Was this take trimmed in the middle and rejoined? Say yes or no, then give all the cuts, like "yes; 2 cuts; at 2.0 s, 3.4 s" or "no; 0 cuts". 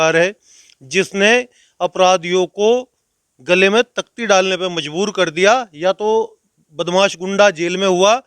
no; 0 cuts